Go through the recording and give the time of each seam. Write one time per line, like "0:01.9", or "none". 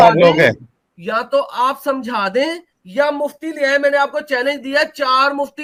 none